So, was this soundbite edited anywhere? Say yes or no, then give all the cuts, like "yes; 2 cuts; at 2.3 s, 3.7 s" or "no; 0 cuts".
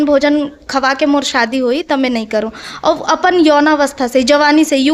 no; 0 cuts